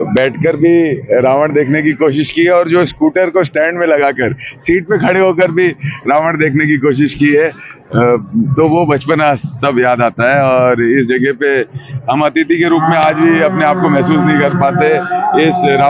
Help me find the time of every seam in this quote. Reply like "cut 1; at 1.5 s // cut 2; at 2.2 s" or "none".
none